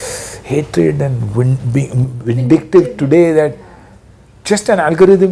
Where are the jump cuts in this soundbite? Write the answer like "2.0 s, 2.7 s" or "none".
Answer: none